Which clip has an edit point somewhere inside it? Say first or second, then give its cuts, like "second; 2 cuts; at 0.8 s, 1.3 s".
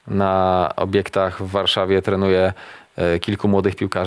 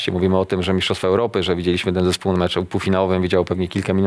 second; 1 cut; at 2.3 s